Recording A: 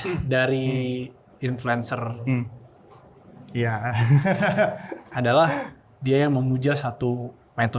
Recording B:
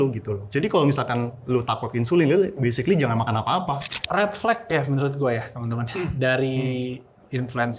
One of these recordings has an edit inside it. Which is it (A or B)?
B